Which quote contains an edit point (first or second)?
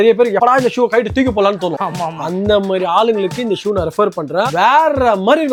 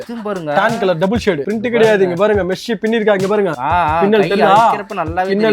second